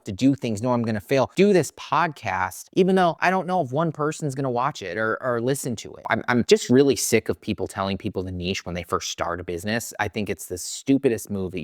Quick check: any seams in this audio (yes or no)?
yes